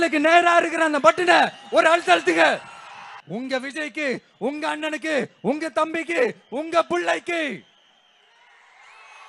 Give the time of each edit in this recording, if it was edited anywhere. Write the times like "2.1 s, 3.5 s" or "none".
3.1 s